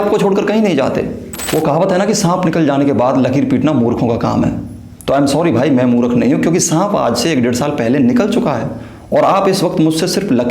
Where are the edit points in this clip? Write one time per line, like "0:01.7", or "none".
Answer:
0:01.3